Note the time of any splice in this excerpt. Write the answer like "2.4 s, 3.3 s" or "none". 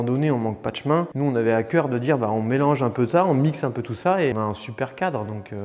1.2 s